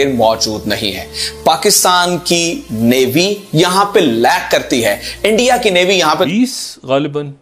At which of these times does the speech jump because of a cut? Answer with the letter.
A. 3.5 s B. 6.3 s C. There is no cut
B